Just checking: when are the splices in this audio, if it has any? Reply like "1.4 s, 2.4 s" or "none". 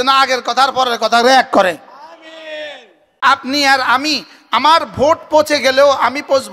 3.2 s